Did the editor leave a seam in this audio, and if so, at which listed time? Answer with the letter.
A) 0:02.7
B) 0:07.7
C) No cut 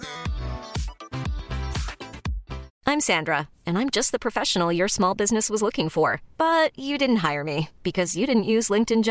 A